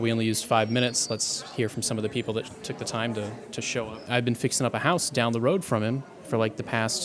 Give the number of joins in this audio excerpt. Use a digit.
1